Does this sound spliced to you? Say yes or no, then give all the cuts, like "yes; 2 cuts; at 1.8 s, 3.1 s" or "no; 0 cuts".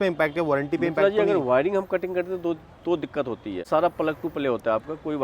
yes; 1 cut; at 3.7 s